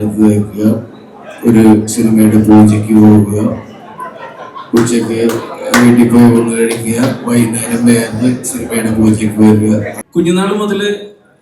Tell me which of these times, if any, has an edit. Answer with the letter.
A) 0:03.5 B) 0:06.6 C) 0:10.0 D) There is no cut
C